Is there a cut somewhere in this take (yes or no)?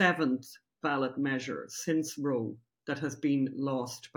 no